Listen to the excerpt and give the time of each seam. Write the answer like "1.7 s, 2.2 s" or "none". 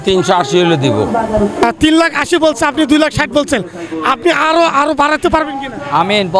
1.8 s